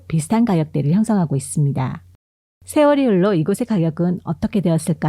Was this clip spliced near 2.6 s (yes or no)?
yes